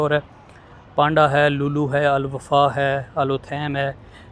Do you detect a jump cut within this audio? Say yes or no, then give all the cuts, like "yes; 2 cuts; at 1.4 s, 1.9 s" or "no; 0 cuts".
no; 0 cuts